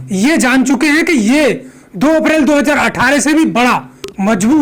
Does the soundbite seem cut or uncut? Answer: uncut